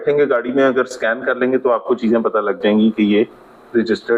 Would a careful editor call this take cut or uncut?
uncut